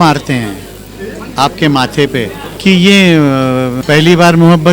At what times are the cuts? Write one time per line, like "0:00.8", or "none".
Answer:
0:02.4
0:03.8